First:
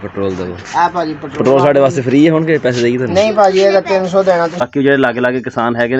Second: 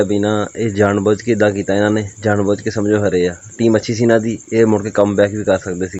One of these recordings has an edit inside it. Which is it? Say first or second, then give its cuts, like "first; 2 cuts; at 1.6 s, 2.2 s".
first; 1 cut; at 4.7 s